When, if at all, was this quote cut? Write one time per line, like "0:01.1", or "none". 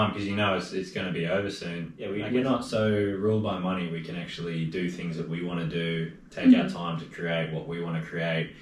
0:02.1